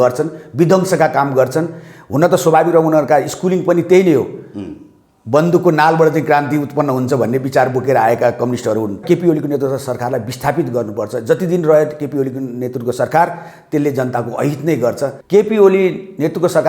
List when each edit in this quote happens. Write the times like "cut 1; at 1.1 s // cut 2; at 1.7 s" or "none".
cut 1; at 9.0 s // cut 2; at 15.1 s